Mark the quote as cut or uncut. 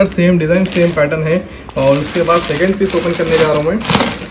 uncut